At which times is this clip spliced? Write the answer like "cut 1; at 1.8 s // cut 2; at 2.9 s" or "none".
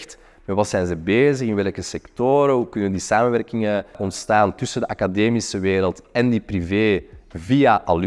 cut 1; at 4.1 s